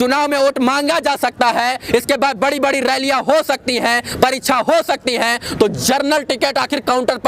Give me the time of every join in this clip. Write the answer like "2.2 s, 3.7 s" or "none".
none